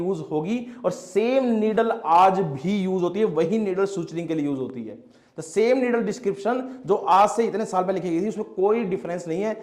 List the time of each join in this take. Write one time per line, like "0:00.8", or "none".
none